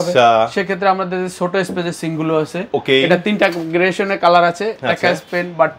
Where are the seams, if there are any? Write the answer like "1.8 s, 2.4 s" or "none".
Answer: none